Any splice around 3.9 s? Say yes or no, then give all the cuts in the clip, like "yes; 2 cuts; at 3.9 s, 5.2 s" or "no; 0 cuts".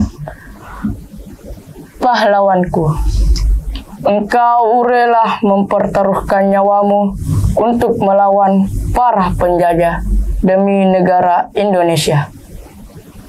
no; 1 cut; at 1.1 s